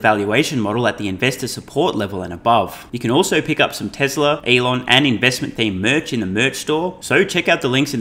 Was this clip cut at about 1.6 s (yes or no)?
no